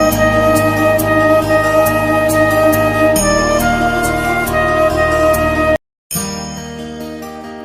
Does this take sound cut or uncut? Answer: cut